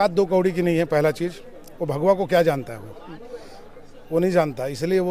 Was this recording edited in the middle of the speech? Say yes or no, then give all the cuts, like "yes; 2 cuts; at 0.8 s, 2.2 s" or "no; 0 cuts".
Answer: no; 0 cuts